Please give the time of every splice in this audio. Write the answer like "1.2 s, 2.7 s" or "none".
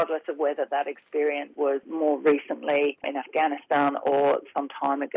1.7 s, 3.1 s